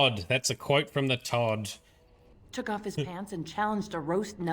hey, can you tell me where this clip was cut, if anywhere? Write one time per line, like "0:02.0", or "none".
0:02.3